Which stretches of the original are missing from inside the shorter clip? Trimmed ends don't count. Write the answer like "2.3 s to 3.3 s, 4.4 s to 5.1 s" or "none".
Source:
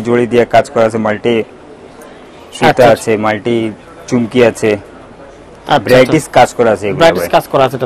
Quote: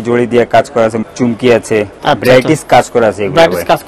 1.0 s to 3.9 s, 4.9 s to 5.6 s

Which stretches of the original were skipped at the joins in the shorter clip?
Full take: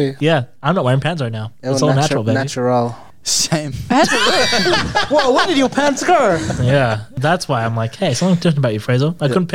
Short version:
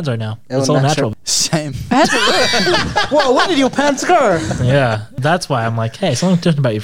2.2 s to 3.1 s

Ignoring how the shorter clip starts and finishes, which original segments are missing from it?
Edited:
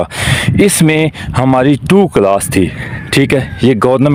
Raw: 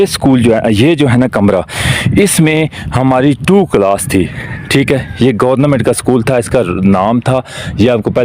none

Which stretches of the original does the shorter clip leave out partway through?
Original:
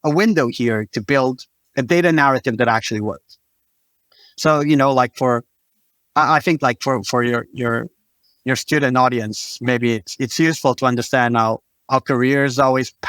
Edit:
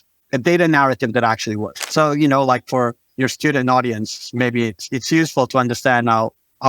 3.2 s to 4.2 s, 5.5 s to 8.3 s

